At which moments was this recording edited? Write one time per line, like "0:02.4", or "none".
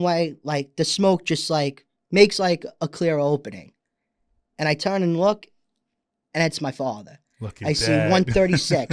none